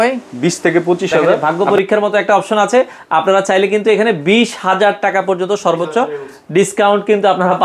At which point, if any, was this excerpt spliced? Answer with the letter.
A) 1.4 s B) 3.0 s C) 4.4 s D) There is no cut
A